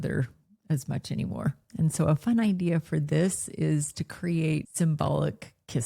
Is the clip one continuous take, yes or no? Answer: no